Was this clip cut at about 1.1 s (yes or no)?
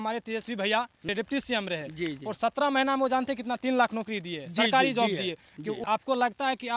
yes